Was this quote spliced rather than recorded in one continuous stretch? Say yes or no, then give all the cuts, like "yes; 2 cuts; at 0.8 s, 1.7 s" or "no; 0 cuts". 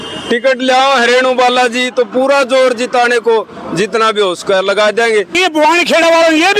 yes; 1 cut; at 5.4 s